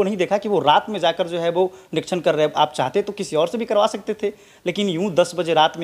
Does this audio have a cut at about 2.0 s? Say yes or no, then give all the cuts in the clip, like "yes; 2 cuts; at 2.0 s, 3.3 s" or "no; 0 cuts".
no; 0 cuts